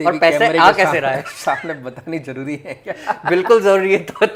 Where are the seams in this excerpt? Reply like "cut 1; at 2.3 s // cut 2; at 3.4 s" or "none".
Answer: none